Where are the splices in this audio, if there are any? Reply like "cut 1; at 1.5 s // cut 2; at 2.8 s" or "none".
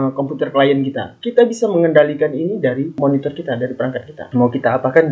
none